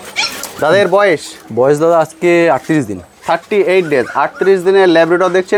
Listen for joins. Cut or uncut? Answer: uncut